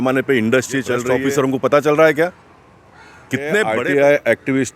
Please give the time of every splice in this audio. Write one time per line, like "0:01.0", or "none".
0:01.6
0:03.5